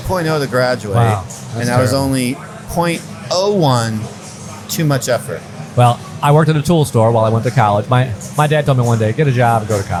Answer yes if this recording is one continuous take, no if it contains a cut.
yes